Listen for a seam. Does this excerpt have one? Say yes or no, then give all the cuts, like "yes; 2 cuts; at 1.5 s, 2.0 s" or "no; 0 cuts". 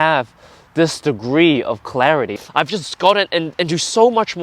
yes; 1 cut; at 2.3 s